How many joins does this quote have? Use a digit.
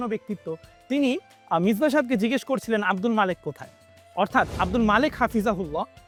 0